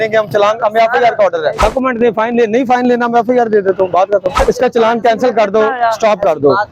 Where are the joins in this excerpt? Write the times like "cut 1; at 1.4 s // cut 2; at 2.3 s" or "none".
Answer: cut 1; at 1.6 s // cut 2; at 4.4 s